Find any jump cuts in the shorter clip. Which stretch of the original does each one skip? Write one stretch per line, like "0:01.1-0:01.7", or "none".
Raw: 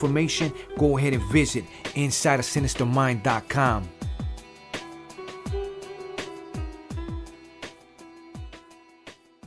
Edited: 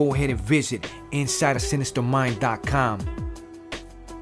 0:03.9-0:07.0